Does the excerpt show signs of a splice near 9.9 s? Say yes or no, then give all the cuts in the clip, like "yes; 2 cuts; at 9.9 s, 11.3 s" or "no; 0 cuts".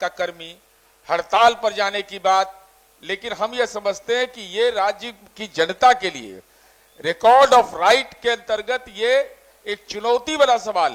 no; 0 cuts